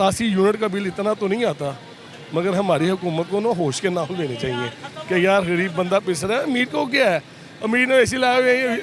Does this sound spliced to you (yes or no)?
no